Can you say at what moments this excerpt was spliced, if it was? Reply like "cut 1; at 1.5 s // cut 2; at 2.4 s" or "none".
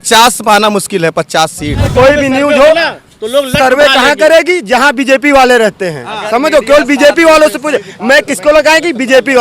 cut 1; at 1.9 s

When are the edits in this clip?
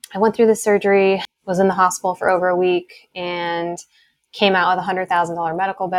cut 1; at 1.3 s

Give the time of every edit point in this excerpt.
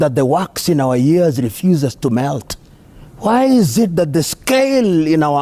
none

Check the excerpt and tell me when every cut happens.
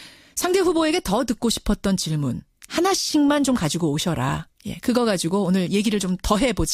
none

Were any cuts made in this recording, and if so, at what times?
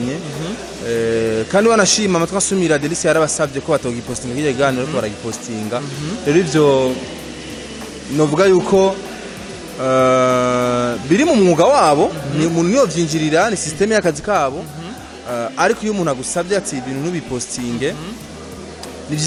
none

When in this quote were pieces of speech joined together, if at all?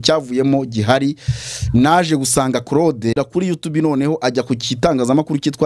cut 1; at 3.2 s

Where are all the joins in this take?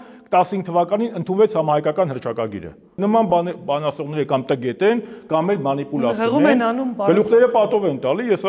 cut 1; at 3.0 s

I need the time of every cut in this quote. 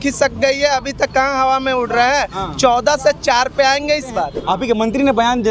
cut 1; at 4.4 s

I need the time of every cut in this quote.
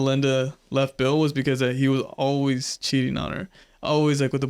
none

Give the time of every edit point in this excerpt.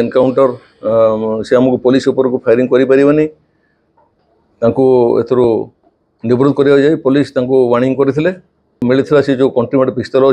cut 1; at 8.7 s

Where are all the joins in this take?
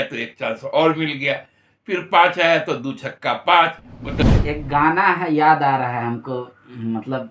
cut 1; at 4.2 s

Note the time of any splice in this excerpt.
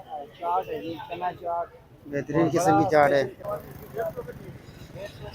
cut 1; at 3.4 s

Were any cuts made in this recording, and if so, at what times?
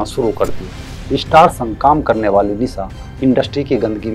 cut 1; at 0.9 s

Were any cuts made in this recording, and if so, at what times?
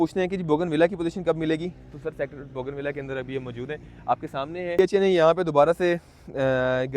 cut 1; at 4.8 s

